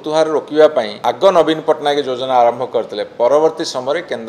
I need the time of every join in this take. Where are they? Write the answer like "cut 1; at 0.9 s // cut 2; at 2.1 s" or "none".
cut 1; at 0.9 s